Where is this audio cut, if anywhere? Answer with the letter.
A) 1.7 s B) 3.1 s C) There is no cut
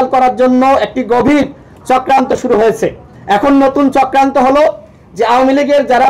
B